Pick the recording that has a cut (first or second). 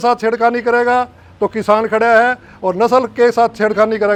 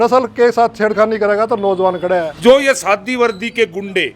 second